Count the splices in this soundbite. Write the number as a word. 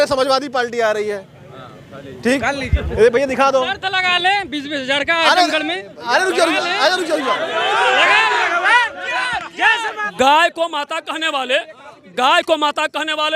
one